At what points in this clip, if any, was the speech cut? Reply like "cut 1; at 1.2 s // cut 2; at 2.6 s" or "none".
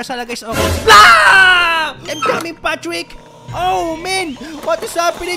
cut 1; at 2.1 s